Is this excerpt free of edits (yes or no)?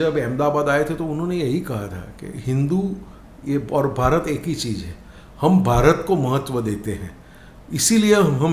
yes